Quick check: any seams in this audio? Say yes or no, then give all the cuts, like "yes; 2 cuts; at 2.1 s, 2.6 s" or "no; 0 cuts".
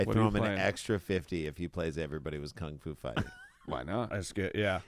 no; 0 cuts